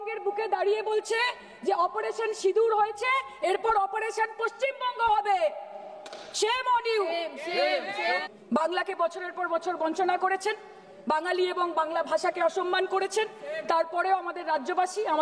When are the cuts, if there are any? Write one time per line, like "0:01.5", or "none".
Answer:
0:08.2